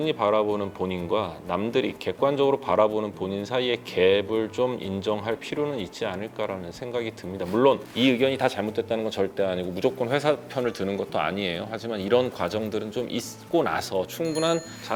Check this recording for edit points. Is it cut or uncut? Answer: uncut